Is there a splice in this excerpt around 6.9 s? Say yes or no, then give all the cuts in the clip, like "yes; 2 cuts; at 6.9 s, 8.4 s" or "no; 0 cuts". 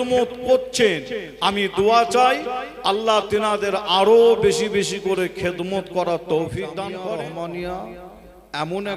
yes; 1 cut; at 6.9 s